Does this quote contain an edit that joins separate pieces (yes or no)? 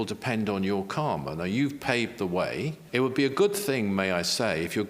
yes